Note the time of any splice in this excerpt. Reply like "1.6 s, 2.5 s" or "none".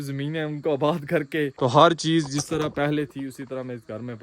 1.5 s